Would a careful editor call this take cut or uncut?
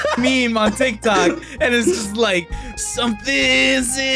uncut